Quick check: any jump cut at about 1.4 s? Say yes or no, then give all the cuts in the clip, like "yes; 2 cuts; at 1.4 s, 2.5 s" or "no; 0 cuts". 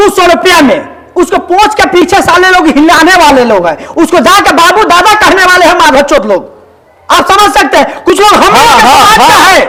no; 0 cuts